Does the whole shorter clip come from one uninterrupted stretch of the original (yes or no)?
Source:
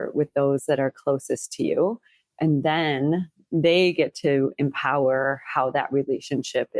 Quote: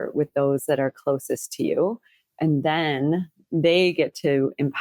yes